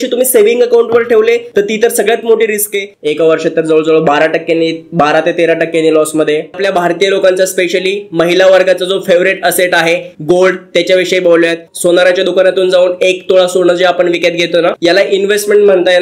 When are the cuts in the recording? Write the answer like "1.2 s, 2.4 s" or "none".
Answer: 2.9 s, 6.6 s, 11.6 s, 14.8 s